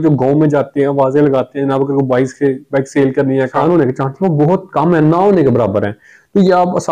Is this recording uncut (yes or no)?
no